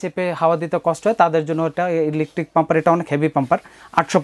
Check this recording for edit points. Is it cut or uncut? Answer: uncut